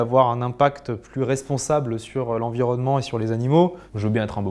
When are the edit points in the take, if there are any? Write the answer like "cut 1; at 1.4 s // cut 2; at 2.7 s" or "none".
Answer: none